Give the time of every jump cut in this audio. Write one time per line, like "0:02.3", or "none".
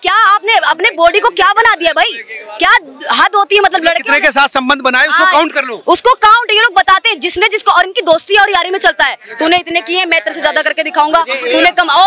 none